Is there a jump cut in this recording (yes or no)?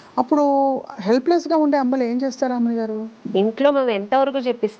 yes